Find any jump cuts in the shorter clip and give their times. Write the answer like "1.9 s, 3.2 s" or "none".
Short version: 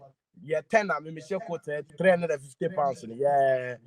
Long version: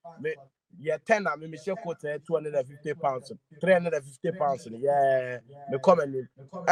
1.8 s